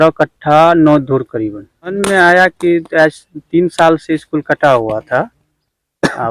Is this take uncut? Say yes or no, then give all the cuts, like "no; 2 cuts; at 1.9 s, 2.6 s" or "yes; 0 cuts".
no; 1 cut; at 2.0 s